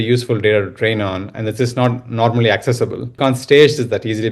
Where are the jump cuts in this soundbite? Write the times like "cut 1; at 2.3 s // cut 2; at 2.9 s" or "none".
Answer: cut 1; at 3.2 s